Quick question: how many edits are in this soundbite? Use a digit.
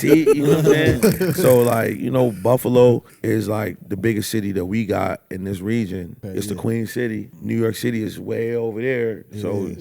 3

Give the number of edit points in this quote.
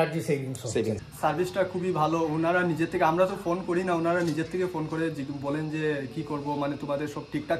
1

